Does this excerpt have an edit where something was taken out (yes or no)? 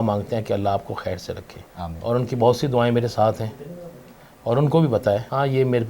no